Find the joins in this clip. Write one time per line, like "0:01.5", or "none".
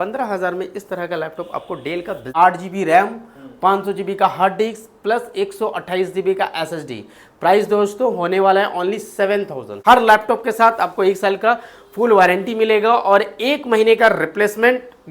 0:02.2
0:09.7